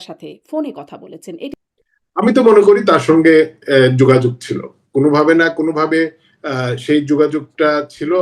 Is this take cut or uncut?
cut